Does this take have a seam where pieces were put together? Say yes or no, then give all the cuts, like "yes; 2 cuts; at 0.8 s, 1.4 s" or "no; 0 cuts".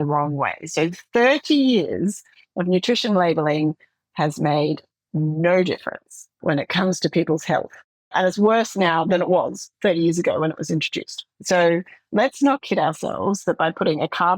yes; 3 cuts; at 6.4 s, 8.1 s, 9.1 s